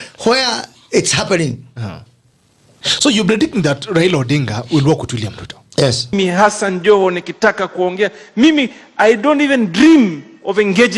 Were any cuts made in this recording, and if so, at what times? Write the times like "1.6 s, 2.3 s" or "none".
5.7 s